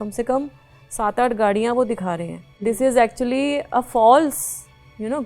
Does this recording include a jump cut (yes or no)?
yes